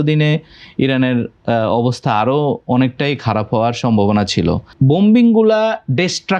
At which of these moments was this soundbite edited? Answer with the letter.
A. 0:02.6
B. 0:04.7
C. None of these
B